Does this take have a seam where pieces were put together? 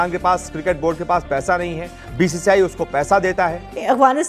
yes; 1 cut; at 3.4 s

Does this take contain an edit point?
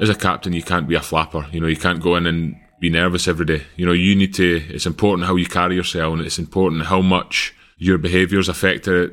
no; 0 cuts

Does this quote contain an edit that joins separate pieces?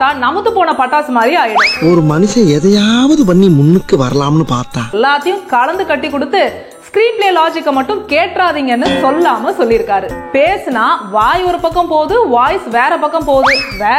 yes; 2 cuts; at 4.9 s, 10.2 s

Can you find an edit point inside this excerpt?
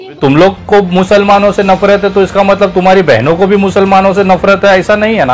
no; 0 cuts

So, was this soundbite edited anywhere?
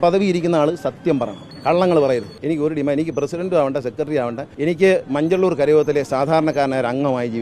yes; 3 cuts; at 1.4 s, 2.3 s, 4.4 s

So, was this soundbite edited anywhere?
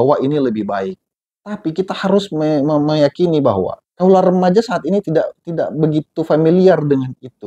no; 0 cuts

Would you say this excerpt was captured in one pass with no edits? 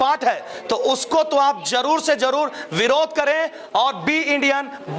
yes; 0 cuts

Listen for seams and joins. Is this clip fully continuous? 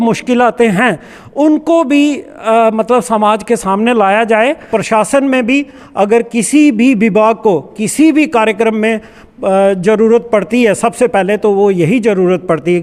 no; 1 cut; at 4.6 s

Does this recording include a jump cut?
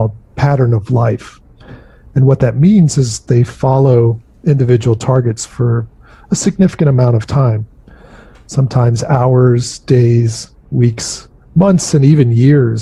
no; 0 cuts

